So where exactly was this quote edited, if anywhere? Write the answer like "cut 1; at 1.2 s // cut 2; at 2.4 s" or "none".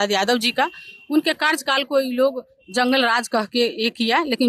none